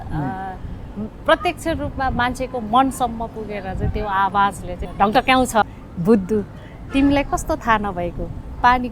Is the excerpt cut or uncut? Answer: cut